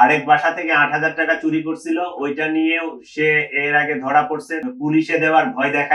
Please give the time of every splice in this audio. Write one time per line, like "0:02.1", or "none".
0:04.6